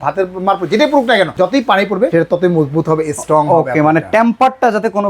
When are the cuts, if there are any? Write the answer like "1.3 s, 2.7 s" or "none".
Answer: 1.7 s